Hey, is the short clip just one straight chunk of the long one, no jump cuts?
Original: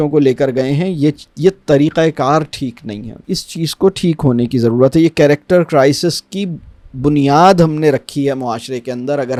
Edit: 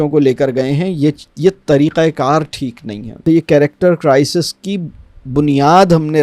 no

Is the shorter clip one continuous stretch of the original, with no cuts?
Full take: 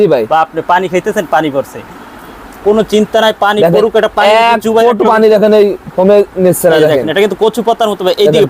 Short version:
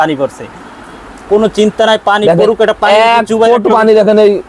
yes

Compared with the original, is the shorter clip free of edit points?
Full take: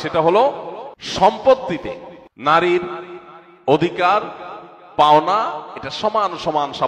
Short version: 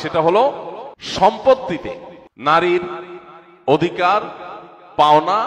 yes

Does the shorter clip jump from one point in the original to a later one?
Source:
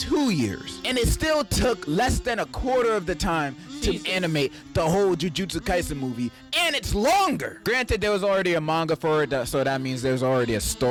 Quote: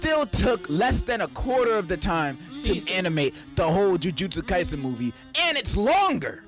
no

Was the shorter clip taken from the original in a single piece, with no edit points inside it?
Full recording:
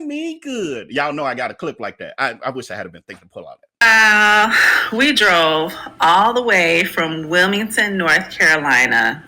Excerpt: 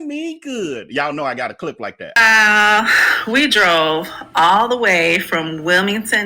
no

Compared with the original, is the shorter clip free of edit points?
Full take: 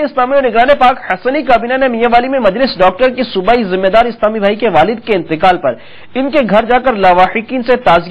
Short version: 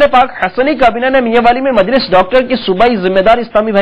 yes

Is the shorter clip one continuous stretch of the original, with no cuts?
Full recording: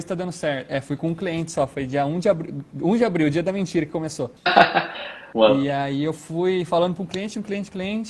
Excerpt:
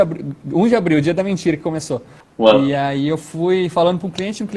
no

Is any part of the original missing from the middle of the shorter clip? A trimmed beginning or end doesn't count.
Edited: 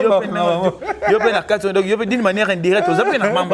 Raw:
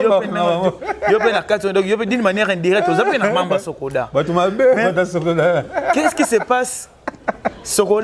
no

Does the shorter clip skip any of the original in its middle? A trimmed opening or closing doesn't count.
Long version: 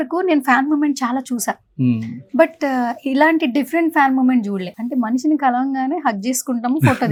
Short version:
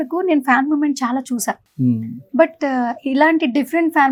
no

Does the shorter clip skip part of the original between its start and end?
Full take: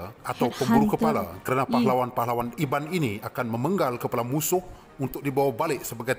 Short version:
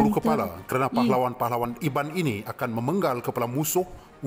no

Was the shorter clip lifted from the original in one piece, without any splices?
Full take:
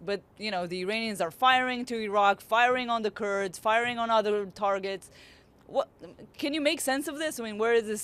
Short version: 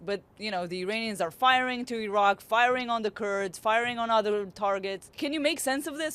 no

